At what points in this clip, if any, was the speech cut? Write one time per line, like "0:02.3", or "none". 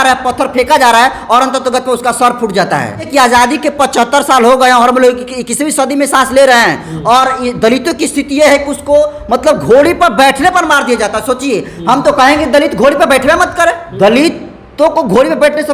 0:03.1
0:13.9